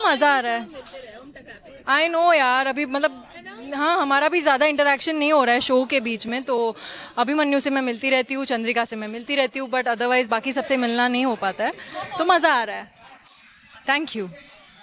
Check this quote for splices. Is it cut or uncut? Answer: uncut